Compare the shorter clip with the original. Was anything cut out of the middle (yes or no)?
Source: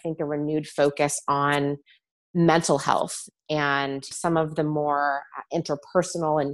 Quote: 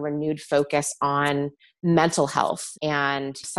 yes